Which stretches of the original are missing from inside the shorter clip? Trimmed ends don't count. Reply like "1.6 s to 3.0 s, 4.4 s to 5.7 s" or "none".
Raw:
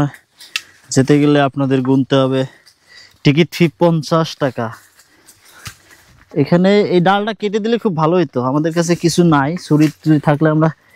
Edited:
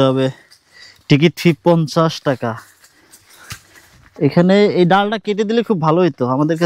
none